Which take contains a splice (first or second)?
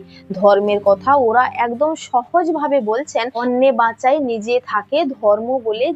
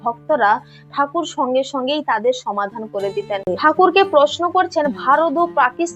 second